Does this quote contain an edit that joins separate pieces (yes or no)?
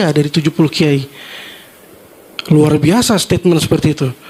no